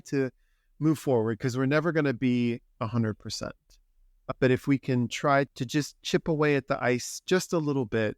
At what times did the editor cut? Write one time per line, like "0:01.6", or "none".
0:05.5